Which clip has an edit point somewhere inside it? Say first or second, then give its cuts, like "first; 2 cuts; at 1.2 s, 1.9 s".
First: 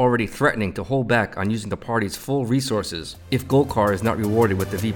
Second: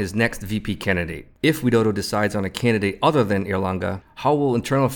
second; 2 cuts; at 1.2 s, 4.1 s